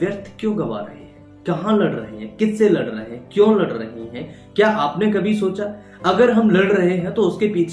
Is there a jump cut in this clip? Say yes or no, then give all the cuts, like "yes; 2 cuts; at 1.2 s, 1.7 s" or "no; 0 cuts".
no; 0 cuts